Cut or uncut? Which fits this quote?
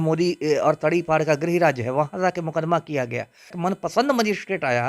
cut